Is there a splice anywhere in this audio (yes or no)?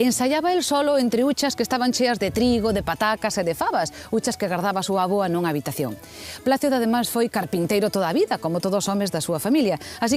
no